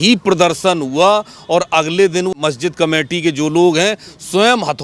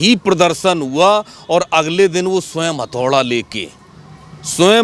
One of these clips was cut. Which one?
first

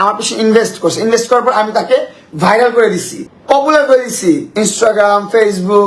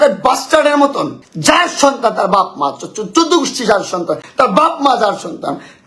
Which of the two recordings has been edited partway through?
second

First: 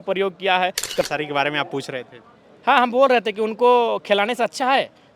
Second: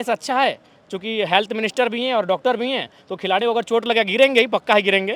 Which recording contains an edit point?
first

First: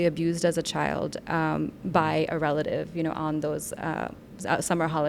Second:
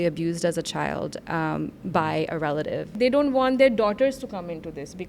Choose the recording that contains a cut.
second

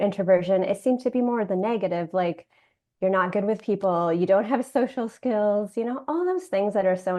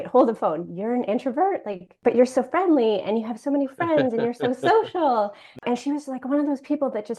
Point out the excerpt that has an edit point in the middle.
second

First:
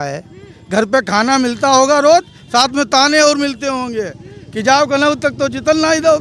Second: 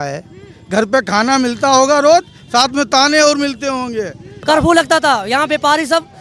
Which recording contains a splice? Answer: second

